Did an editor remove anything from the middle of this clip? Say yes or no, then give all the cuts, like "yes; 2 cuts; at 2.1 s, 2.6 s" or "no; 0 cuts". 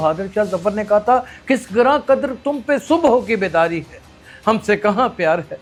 no; 0 cuts